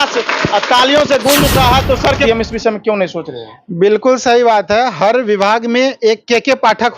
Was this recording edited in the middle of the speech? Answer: yes; 1 cut; at 2.2 s

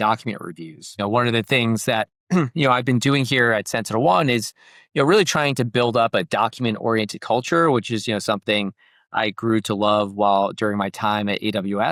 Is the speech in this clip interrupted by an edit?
no; 0 cuts

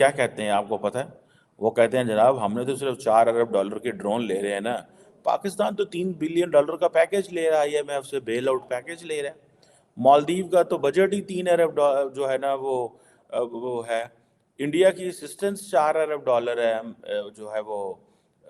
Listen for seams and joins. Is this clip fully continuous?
yes; 0 cuts

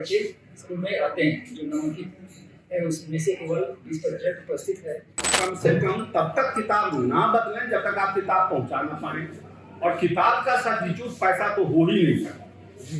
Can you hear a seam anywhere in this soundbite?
yes; 1 cut; at 5.4 s

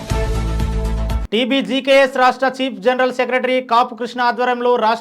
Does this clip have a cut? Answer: yes; 1 cut; at 1.2 s

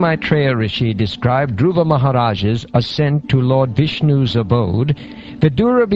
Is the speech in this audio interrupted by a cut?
yes; 1 cut; at 2.9 s

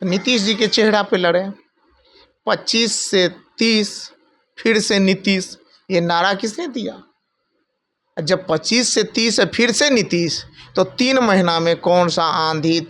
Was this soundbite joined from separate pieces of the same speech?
no; 0 cuts

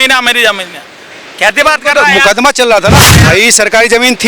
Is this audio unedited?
no; 1 cut; at 3.2 s

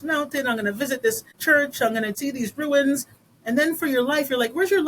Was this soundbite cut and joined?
yes; 2 cuts; at 1.3 s, 2.2 s

